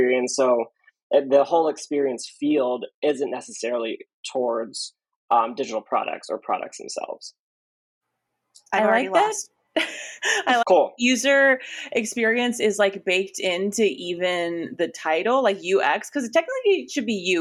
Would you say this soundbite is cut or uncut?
uncut